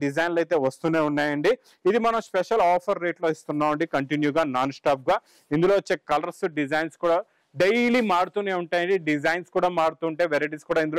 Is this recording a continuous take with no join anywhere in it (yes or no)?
yes